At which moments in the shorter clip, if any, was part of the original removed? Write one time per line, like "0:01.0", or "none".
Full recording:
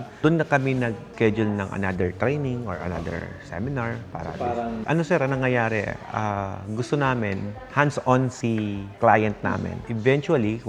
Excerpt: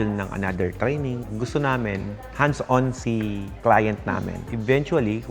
0:01.2

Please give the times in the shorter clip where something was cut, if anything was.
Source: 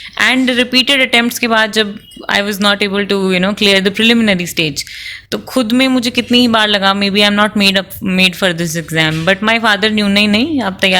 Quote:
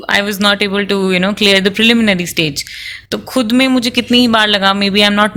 none

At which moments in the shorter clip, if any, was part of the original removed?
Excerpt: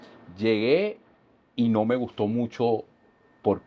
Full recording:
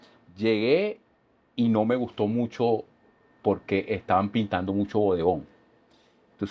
none

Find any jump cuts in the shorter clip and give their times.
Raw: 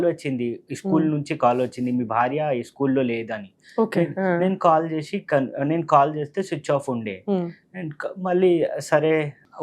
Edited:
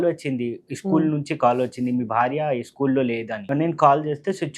0:03.4

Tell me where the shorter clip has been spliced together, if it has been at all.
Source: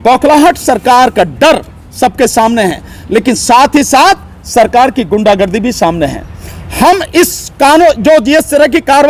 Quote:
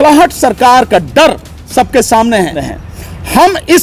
0:02.7

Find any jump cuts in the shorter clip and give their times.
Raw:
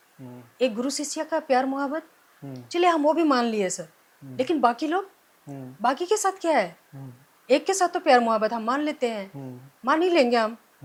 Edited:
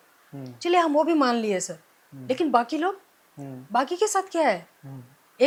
none

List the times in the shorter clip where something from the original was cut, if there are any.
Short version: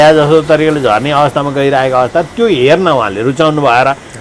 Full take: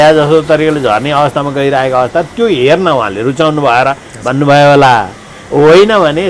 none

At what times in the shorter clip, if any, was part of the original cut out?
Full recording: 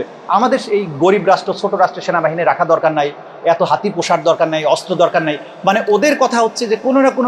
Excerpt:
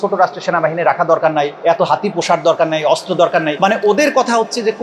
0:01.5
0:03.5

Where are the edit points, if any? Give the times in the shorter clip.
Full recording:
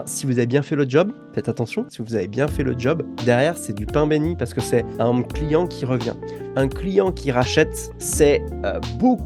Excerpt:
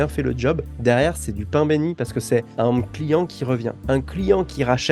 0:03.8

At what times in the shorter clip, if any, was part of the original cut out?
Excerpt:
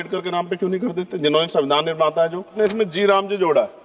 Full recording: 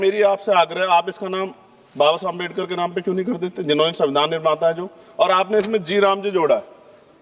0:02.5

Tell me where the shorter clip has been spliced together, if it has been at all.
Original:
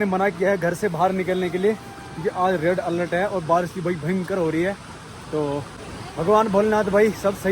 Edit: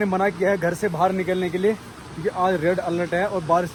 none

